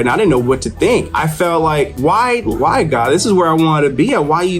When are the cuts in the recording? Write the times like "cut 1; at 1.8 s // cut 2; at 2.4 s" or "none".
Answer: cut 1; at 1.1 s // cut 2; at 2.6 s